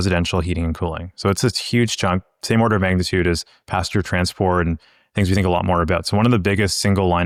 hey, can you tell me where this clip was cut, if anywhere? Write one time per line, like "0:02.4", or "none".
none